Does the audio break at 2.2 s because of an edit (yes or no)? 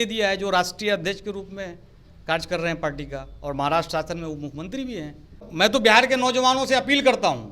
no